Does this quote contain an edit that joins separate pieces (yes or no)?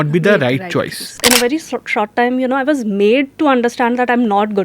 yes